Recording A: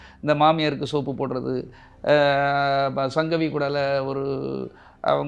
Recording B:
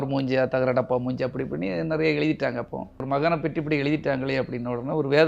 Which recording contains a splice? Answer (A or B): B